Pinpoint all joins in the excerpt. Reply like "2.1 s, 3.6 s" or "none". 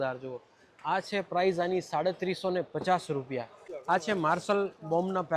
3.7 s

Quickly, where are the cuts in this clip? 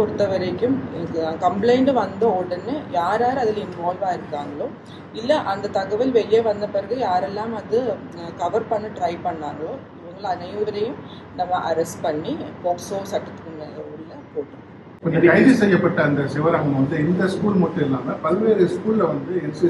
14.8 s

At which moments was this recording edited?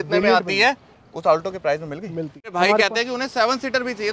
2.5 s

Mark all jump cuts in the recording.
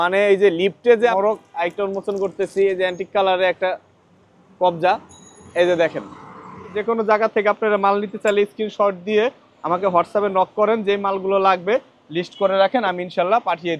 1.1 s, 6.8 s

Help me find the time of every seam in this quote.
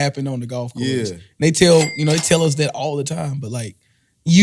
none

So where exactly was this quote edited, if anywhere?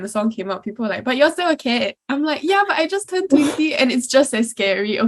none

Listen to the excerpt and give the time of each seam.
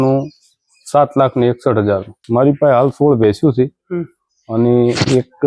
2.1 s

